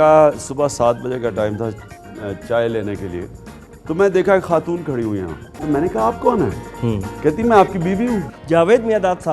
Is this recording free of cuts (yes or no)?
no